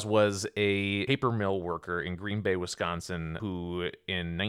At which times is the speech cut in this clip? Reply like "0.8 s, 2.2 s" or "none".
1.0 s, 3.3 s